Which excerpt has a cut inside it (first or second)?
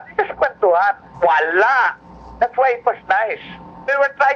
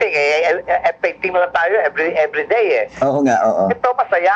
first